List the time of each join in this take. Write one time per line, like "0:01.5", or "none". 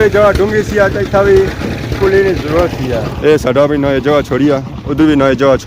0:03.1